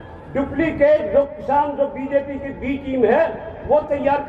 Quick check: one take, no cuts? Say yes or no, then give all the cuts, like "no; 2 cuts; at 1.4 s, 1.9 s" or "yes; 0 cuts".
yes; 0 cuts